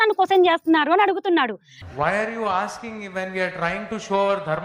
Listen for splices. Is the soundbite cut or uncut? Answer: uncut